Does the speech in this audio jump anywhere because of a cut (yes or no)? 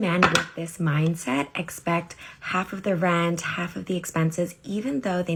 no